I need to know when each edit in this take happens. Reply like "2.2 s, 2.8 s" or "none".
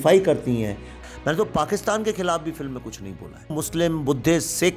1.0 s, 3.6 s